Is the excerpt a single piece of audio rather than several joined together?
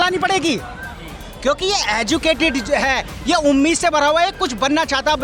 yes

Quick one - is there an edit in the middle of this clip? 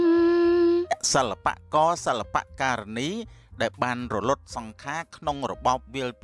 yes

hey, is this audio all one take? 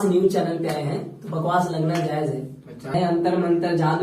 no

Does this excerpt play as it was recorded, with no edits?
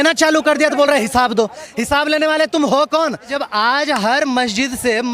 no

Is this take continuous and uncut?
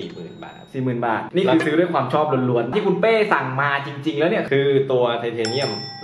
no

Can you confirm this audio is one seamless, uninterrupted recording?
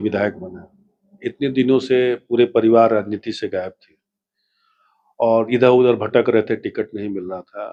yes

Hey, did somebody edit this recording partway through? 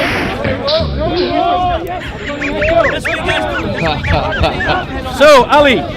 no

